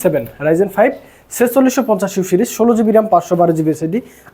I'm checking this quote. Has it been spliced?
no; 0 cuts

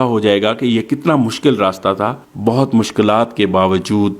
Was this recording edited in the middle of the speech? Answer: yes; 1 cut; at 2.2 s

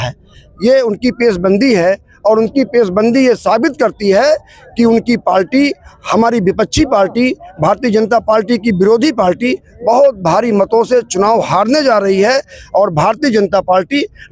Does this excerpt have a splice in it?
no; 0 cuts

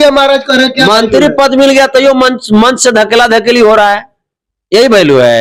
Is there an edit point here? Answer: no; 0 cuts

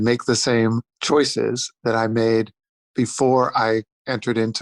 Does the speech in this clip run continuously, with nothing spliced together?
no; 1 cut; at 0.9 s

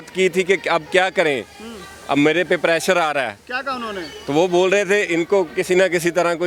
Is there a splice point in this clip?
no; 0 cuts

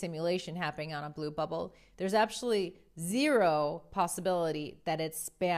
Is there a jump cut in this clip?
no; 0 cuts

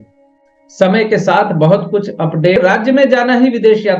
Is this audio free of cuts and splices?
no; 1 cut; at 2.6 s

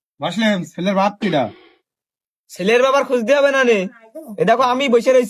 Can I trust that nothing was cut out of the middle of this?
yes; 0 cuts

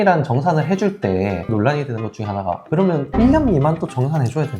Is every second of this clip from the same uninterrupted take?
no; 2 cuts; at 1.5 s, 2.9 s

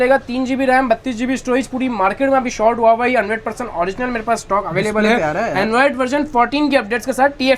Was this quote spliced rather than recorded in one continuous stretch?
no; 0 cuts

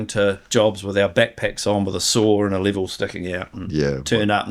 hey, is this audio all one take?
yes; 0 cuts

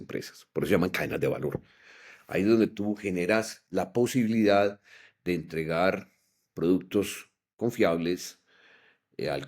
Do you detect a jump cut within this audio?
no; 0 cuts

